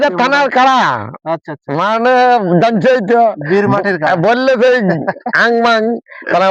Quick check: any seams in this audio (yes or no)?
no